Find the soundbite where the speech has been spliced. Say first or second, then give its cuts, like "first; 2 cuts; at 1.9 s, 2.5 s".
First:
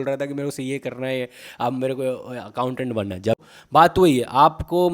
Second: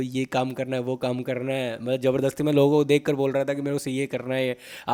first; 1 cut; at 3.4 s